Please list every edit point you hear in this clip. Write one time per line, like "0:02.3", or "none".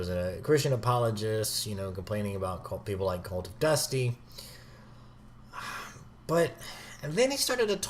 0:06.9